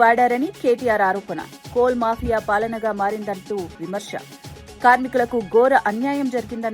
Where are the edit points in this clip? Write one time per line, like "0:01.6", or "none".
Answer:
none